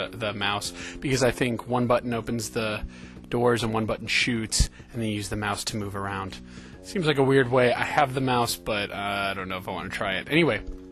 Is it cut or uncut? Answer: uncut